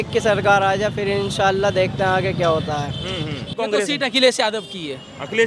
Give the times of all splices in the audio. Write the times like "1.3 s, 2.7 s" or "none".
3.5 s